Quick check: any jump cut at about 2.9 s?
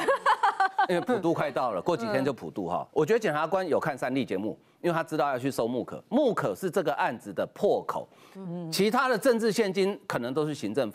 yes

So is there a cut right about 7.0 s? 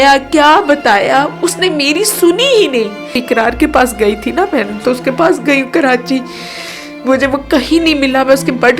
no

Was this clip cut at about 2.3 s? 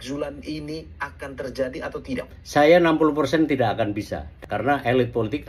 no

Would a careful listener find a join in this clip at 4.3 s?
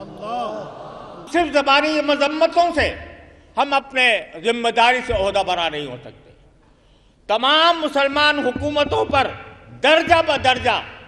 no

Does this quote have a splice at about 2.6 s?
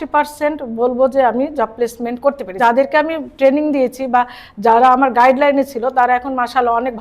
yes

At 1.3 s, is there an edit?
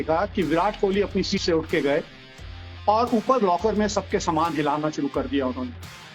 yes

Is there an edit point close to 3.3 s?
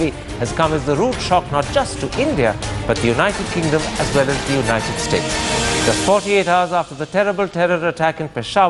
no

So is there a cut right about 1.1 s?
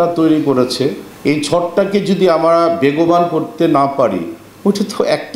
yes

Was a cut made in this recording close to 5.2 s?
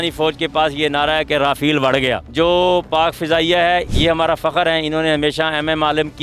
no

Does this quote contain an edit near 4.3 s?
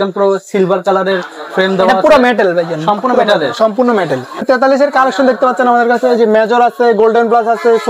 yes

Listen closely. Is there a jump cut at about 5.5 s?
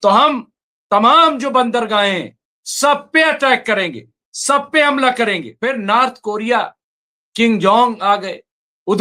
yes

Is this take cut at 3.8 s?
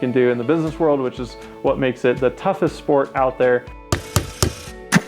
yes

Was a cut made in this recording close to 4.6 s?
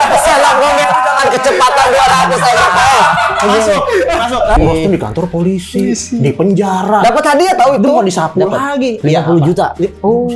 yes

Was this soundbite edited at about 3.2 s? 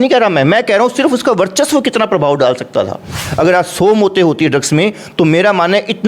yes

